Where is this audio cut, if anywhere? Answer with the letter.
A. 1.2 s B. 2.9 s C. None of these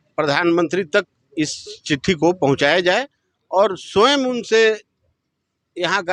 C